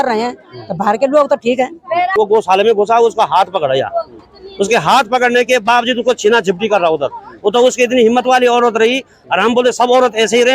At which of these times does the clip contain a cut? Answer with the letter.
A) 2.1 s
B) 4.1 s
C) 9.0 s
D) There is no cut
A